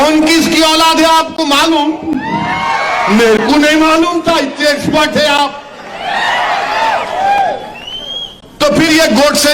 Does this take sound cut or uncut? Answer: uncut